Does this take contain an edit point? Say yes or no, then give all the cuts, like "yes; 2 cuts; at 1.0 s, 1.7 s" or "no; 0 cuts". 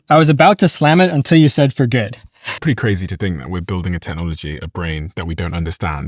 yes; 1 cut; at 2.6 s